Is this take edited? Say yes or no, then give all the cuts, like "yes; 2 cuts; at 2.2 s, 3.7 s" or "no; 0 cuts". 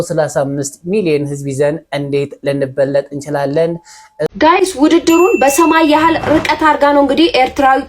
yes; 1 cut; at 4.3 s